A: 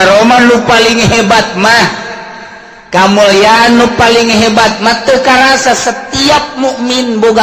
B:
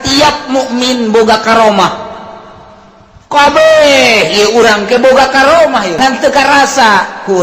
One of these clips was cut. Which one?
B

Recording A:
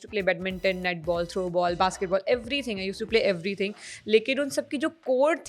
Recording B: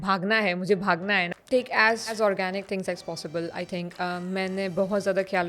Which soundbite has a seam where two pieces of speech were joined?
B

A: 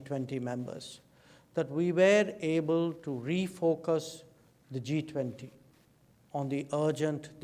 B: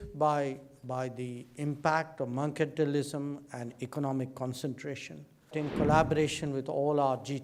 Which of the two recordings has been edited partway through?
B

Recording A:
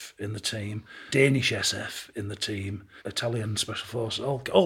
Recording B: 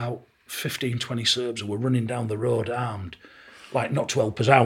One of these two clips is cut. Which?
A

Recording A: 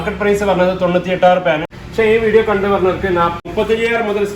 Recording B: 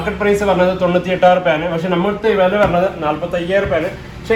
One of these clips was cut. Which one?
A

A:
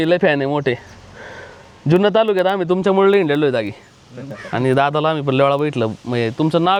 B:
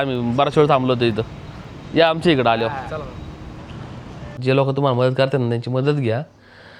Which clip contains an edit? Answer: B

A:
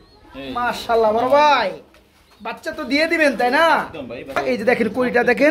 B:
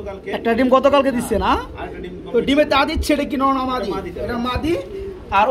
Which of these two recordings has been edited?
A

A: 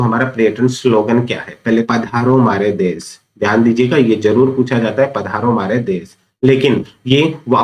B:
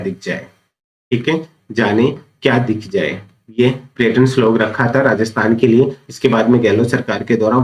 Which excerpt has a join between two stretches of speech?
A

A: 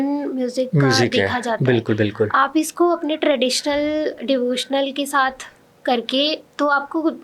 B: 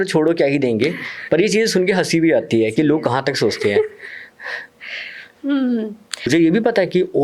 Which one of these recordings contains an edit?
B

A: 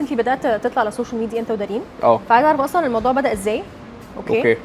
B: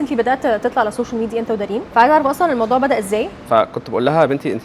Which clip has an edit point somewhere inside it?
B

